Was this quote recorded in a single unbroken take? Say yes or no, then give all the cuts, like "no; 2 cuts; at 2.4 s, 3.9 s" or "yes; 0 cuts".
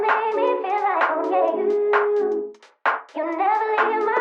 yes; 0 cuts